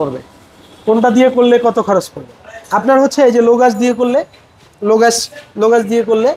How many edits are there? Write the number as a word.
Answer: zero